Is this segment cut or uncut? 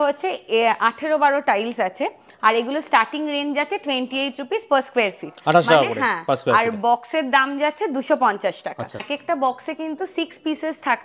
uncut